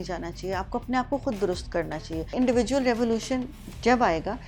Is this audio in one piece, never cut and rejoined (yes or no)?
no